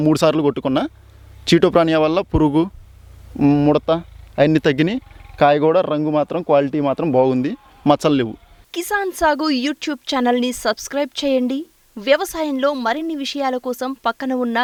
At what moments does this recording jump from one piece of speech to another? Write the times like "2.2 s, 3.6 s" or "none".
none